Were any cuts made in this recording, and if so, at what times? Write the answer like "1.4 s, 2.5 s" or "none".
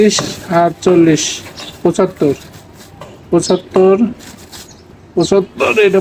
none